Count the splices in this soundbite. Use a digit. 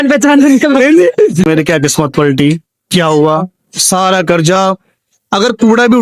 1